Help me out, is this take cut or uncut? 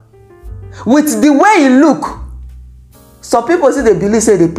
uncut